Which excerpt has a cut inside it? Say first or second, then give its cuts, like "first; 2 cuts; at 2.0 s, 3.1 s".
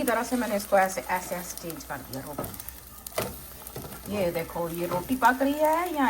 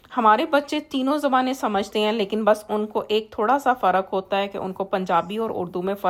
first; 1 cut; at 2.4 s